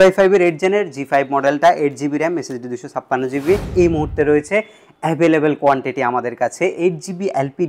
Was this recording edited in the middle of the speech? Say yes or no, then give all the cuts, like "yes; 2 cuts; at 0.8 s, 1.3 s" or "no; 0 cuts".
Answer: yes; 1 cut; at 3.7 s